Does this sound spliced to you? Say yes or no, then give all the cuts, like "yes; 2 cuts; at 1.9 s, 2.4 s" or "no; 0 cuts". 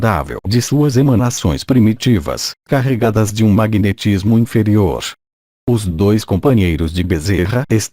yes; 1 cut; at 1.4 s